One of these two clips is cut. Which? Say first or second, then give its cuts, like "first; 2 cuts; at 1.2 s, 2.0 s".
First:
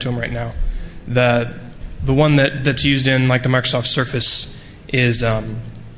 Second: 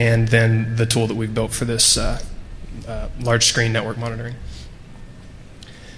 first; 1 cut; at 4.6 s